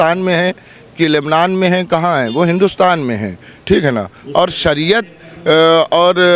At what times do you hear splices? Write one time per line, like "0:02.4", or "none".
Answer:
none